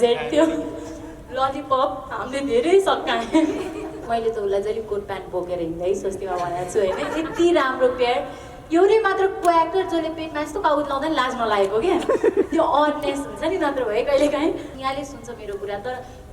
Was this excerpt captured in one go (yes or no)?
no